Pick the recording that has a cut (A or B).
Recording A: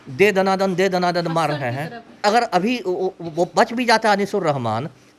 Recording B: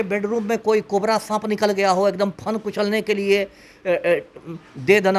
A